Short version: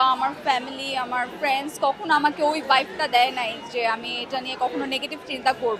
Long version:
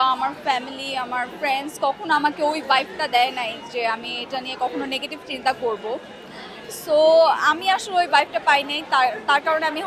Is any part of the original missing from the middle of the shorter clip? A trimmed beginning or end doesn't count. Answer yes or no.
no